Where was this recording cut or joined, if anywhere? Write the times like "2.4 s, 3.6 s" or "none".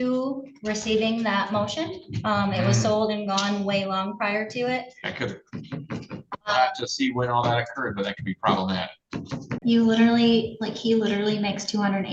9.4 s

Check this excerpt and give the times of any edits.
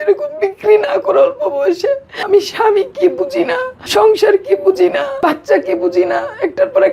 2.1 s, 3.8 s, 5.1 s

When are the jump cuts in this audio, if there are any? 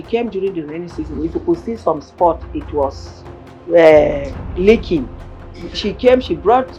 none

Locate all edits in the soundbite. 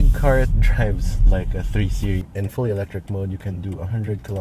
2.3 s

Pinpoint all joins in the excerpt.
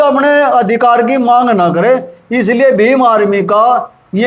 none

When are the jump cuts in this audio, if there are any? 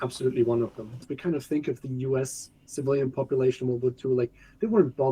1.1 s

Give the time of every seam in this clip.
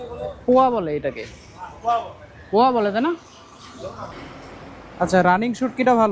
4.1 s

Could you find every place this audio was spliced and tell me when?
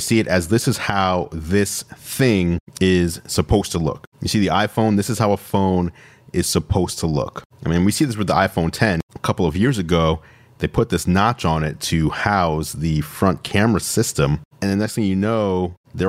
14.5 s

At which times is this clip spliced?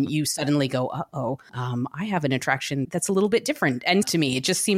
1.5 s, 2.9 s, 4.0 s

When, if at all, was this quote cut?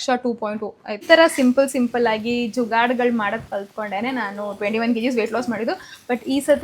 1.0 s

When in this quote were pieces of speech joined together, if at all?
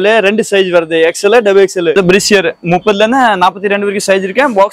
1.9 s

